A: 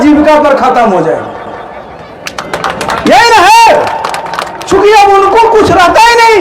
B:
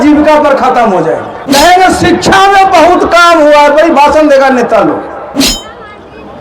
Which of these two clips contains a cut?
B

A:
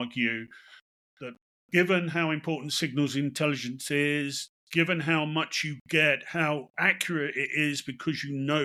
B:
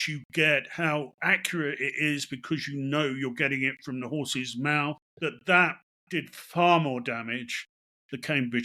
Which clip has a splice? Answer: B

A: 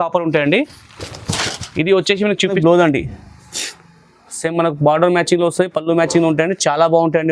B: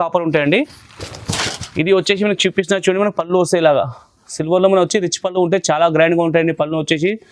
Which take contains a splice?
A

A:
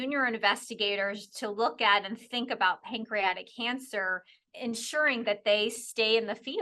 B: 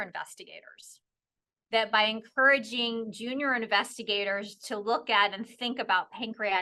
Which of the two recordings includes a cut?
A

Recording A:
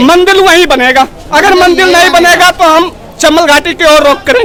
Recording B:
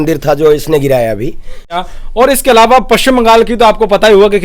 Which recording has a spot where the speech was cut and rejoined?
B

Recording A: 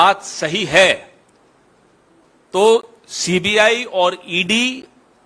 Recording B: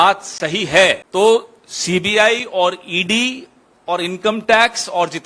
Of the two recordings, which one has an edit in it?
B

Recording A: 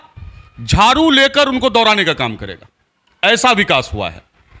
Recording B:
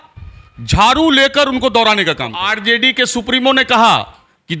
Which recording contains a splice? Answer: B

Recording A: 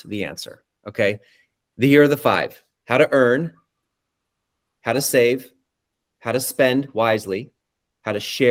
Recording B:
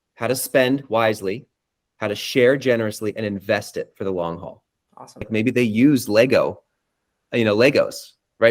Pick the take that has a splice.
B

